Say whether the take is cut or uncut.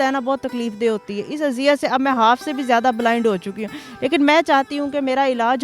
uncut